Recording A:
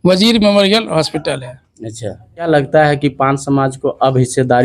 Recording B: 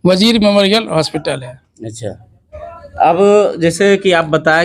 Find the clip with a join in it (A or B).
A